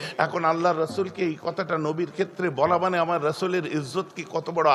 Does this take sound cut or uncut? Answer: uncut